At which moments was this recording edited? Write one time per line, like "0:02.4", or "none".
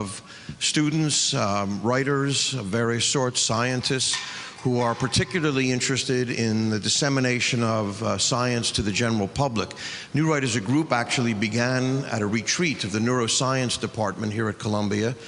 none